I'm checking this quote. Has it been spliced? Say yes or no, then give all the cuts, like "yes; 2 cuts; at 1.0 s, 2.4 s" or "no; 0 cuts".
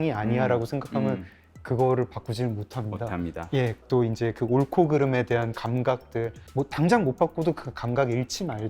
yes; 2 cuts; at 3.8 s, 6.4 s